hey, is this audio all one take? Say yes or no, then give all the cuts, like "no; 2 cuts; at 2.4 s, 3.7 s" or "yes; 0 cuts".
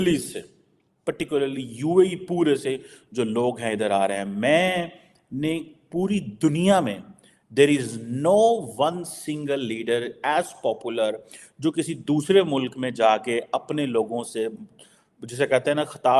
yes; 0 cuts